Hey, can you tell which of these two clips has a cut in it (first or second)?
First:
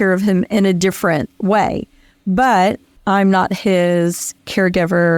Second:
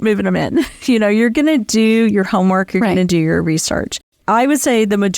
second